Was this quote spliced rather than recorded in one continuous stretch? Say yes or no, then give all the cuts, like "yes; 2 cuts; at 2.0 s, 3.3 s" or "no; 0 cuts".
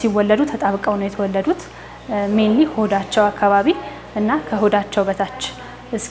no; 0 cuts